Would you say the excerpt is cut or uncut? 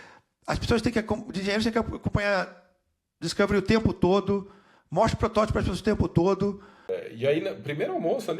cut